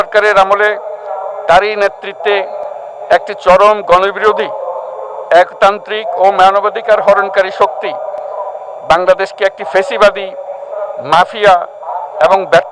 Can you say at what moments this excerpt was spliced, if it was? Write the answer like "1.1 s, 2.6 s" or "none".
none